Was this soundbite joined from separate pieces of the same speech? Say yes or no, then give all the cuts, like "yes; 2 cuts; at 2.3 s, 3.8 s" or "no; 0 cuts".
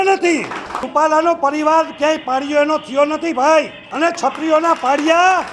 yes; 2 cuts; at 0.8 s, 3.8 s